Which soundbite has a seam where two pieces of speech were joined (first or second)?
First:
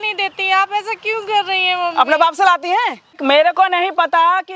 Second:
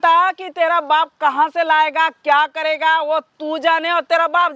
first